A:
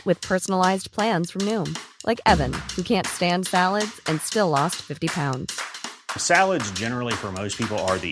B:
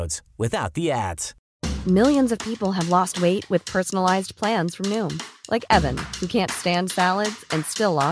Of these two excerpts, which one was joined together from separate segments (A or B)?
B